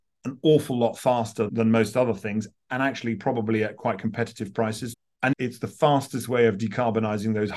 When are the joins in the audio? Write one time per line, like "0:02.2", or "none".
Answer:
0:05.0

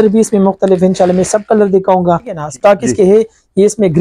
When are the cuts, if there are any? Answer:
0:02.4

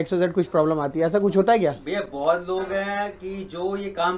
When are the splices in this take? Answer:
none

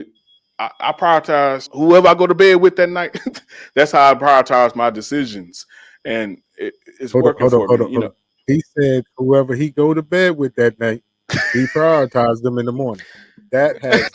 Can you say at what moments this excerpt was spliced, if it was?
0:01.7

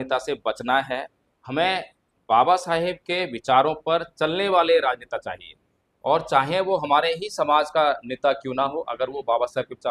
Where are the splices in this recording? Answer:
none

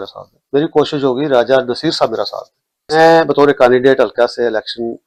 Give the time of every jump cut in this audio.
none

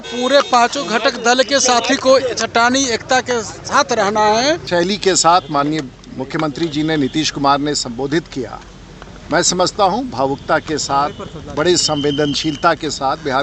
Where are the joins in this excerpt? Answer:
0:04.6

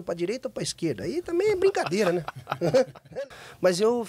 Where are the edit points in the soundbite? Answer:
0:03.1

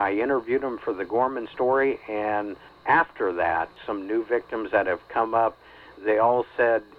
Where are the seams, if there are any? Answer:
0:02.7
0:03.8

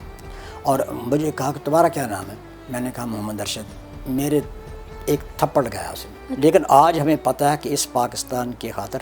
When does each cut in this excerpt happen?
0:06.2

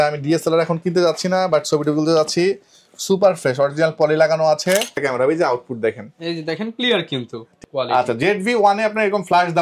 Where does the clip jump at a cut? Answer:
0:05.0
0:07.5

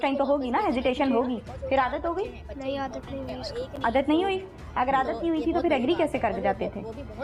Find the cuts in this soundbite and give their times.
none

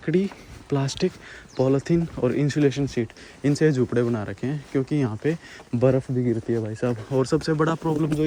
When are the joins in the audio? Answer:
none

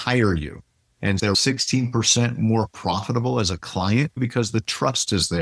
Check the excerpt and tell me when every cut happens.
0:01.3
0:04.2

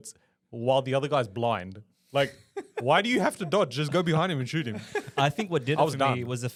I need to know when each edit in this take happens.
none

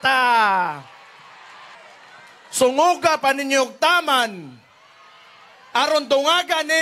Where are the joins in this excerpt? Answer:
0:01.7

